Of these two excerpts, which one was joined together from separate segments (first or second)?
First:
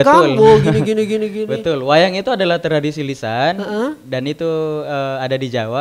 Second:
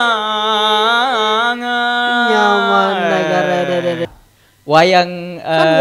second